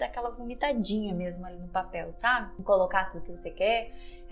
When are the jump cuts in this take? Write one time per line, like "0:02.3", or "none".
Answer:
0:02.5

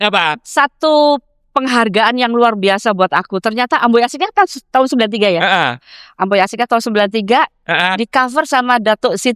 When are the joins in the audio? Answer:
none

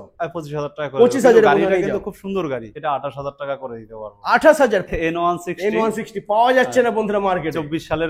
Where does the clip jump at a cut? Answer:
0:02.7
0:04.9

